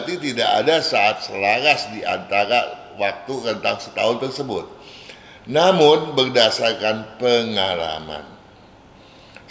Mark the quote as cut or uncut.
uncut